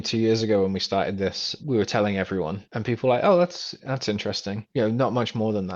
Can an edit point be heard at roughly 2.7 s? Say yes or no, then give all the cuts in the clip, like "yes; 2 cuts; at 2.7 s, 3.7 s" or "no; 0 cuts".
yes; 3 cuts; at 1.6 s, 2.7 s, 4.6 s